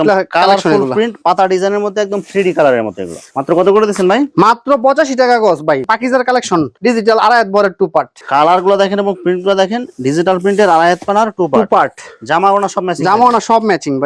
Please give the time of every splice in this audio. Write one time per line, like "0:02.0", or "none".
none